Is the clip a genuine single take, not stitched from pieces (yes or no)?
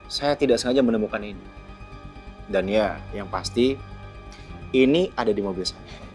yes